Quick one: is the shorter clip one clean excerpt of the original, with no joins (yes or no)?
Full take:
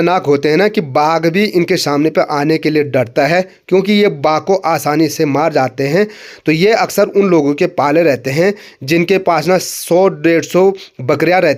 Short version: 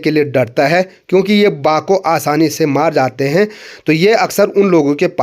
yes